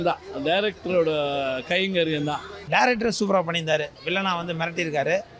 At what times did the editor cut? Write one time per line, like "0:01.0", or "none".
0:02.6